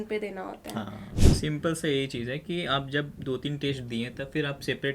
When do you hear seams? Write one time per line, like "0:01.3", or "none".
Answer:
0:01.1